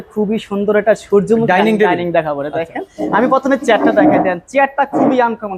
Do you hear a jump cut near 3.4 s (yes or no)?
no